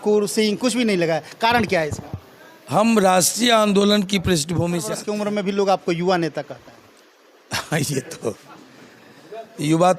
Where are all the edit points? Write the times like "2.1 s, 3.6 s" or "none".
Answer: 4.9 s